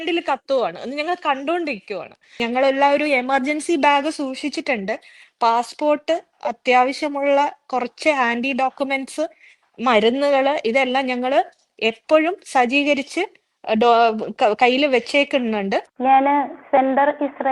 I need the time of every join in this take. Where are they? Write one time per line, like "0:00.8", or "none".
0:02.4
0:15.9

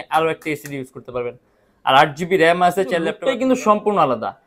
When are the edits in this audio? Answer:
0:03.2

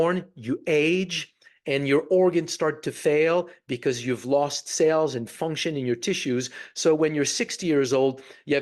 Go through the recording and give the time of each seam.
none

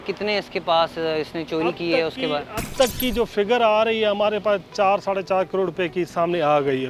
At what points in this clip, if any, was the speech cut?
none

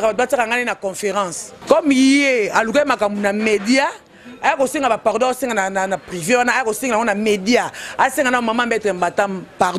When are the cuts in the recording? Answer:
0:01.5

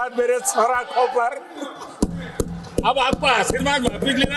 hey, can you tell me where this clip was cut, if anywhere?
none

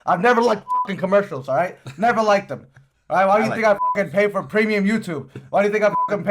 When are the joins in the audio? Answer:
none

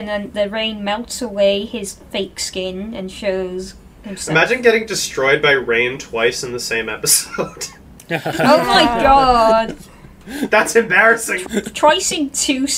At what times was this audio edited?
0:11.4

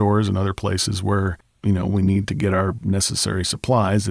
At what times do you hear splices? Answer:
0:01.5

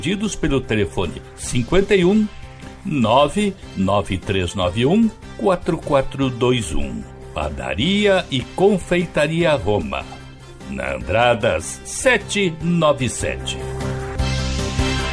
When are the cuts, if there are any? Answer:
0:13.3

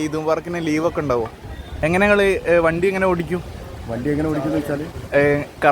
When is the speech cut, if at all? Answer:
0:01.6

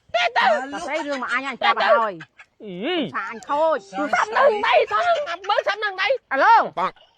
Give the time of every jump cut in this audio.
0:06.3

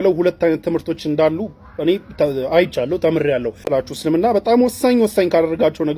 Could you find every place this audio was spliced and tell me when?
0:03.6

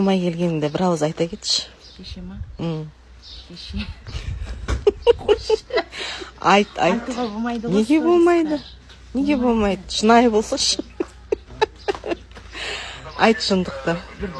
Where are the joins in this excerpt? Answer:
none

